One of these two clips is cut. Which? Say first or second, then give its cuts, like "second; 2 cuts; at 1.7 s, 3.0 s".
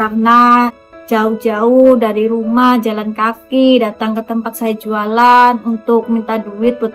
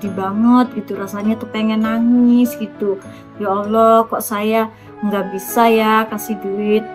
first; 1 cut; at 0.9 s